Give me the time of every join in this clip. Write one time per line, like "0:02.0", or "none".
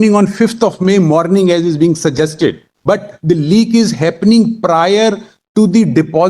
0:02.7

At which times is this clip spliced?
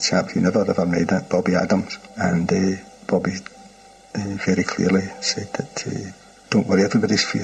0:02.0

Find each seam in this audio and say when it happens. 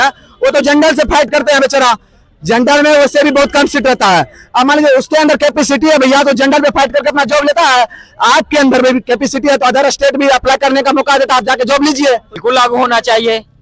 0:12.3

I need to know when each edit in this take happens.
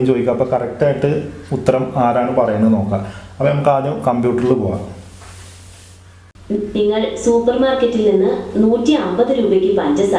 0:06.4

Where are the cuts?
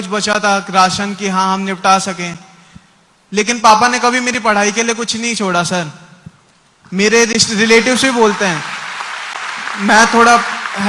none

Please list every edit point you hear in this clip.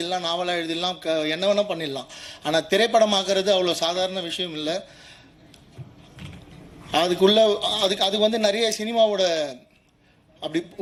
none

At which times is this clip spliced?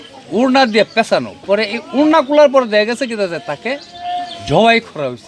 none

